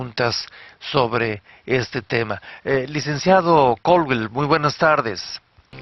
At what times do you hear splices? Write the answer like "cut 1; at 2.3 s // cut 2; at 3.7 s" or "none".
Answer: cut 1; at 3.4 s